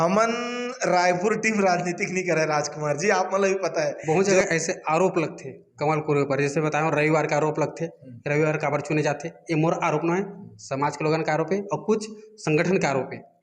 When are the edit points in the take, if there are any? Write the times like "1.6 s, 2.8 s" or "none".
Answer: 4.0 s